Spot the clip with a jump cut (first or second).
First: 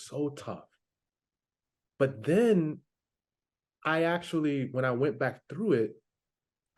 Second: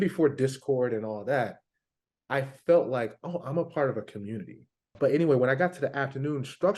second